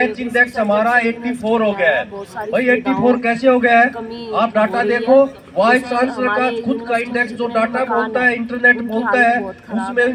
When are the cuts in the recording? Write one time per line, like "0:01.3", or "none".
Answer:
none